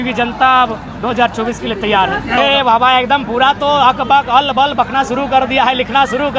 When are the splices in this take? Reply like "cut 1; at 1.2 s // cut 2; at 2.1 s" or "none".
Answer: cut 1; at 2.4 s